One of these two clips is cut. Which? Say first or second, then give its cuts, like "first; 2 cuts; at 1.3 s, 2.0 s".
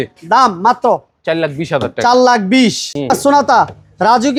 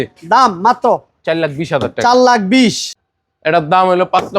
second; 1 cut; at 2.9 s